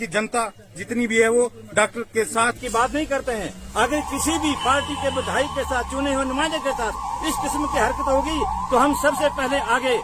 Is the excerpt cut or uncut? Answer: cut